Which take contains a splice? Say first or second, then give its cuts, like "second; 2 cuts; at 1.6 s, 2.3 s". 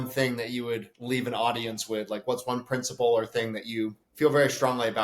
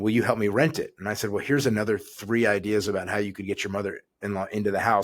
first; 2 cuts; at 0.9 s, 4.0 s